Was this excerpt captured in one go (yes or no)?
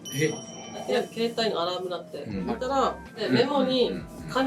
no